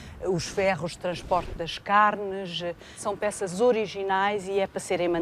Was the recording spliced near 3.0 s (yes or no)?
yes